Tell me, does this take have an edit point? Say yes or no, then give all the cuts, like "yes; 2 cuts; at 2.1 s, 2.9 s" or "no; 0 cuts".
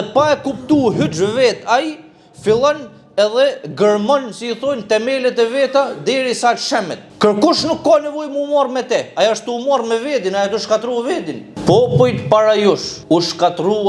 yes; 1 cut; at 11.5 s